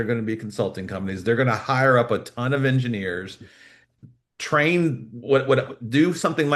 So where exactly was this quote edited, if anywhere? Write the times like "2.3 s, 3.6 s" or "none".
none